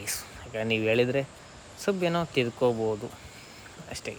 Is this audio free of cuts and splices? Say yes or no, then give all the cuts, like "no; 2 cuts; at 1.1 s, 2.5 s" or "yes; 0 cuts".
yes; 0 cuts